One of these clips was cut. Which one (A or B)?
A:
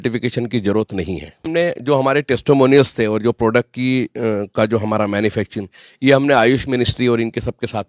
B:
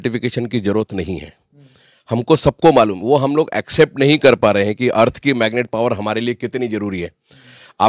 A